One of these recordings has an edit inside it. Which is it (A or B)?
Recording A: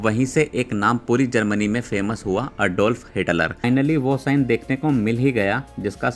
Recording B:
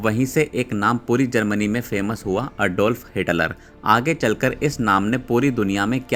A